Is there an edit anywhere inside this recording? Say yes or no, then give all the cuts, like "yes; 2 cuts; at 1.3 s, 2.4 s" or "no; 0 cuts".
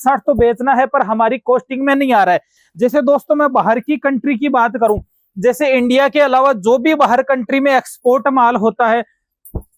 no; 0 cuts